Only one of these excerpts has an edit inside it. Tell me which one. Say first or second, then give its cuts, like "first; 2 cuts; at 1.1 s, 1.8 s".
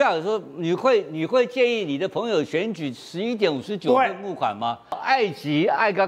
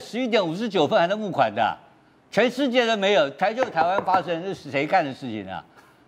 first; 1 cut; at 5.0 s